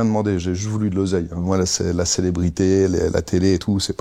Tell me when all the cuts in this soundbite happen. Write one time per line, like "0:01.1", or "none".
0:01.4